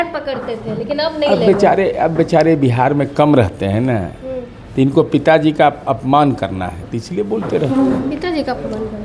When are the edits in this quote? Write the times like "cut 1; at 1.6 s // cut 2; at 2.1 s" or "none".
none